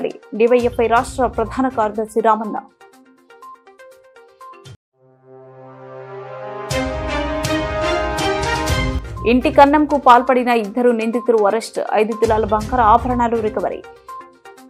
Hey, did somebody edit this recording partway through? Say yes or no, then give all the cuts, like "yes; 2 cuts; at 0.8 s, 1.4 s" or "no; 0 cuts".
no; 0 cuts